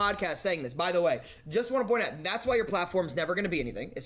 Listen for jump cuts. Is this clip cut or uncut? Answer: cut